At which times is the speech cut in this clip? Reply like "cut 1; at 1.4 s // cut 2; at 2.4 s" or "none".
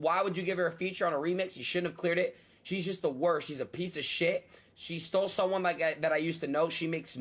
none